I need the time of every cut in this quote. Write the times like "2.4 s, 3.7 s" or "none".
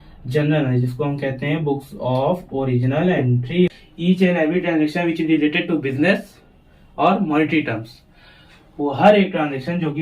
3.5 s